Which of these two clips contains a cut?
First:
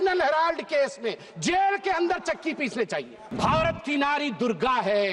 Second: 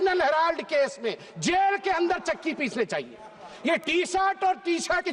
first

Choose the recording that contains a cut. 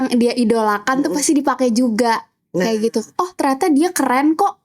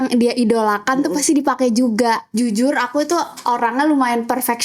second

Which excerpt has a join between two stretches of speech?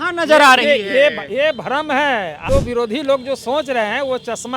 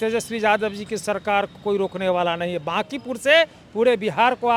first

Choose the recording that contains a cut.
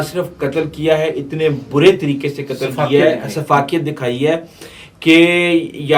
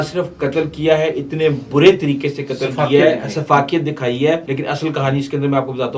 second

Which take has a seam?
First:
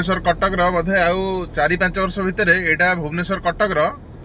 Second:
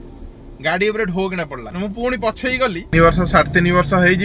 second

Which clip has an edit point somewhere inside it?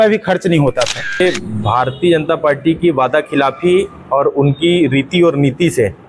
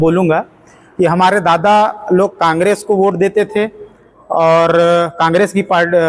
first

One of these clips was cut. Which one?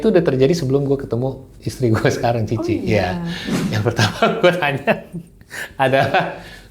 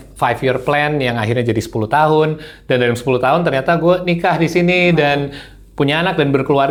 first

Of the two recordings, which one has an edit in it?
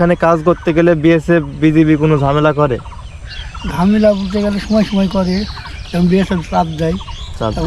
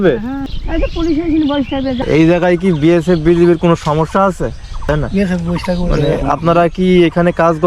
second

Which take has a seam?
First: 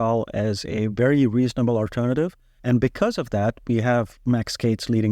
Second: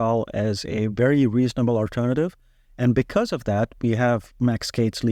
first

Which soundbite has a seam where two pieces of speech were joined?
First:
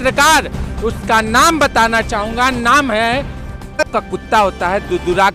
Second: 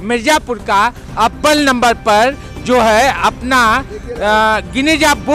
first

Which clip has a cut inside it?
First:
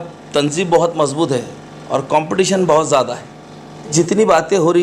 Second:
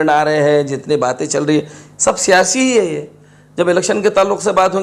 first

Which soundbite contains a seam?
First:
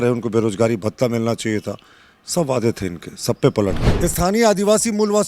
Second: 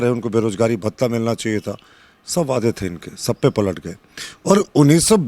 first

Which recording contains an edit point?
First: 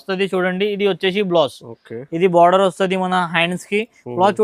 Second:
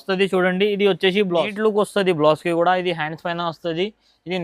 second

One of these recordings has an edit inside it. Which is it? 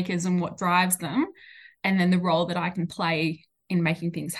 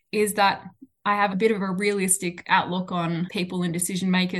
second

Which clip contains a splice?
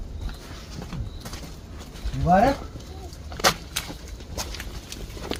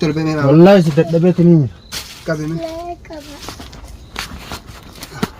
second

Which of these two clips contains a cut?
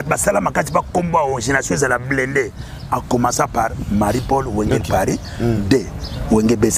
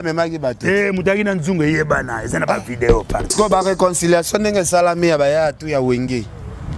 second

